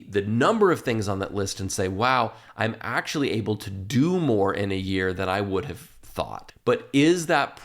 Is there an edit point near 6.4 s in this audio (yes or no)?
yes